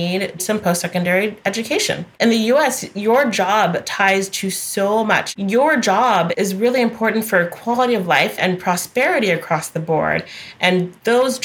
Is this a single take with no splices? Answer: no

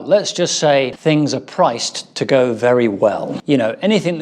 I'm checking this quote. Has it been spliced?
yes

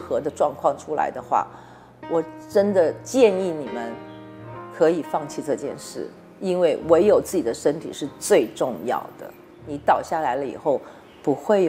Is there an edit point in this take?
no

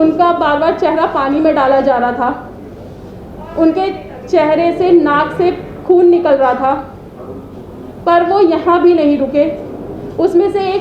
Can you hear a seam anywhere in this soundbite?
no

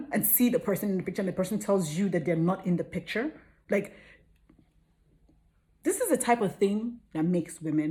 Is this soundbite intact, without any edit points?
yes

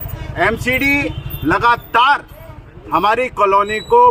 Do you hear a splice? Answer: no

